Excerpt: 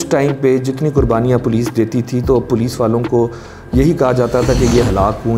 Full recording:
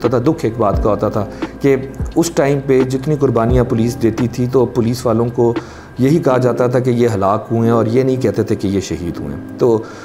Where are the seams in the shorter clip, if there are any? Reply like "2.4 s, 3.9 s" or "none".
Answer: none